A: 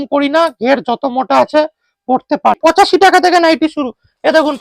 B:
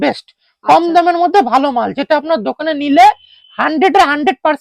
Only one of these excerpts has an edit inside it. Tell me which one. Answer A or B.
A